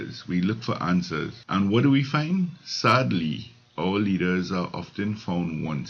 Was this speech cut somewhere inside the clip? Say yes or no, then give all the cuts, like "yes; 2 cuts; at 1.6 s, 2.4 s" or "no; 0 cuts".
yes; 1 cut; at 1.4 s